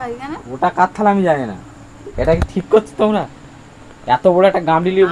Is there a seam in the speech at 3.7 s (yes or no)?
no